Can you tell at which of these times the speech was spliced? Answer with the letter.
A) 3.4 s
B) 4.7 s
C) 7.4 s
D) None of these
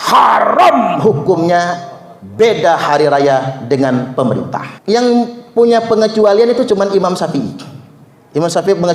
B